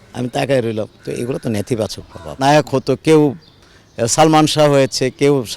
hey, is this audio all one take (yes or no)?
no